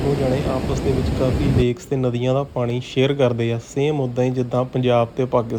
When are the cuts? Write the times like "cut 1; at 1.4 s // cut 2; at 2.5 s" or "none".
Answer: none